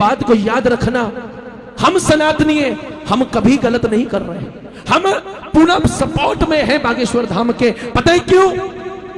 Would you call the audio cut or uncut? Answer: uncut